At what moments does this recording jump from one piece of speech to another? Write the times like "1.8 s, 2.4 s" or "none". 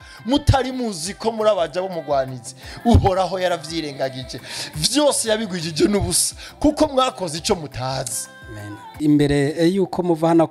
8.9 s